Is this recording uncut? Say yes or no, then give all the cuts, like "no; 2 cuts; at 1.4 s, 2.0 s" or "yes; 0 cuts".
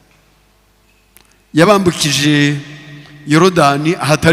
yes; 0 cuts